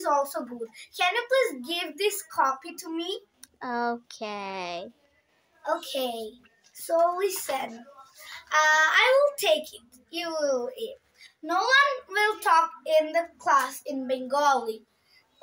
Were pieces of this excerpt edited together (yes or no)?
no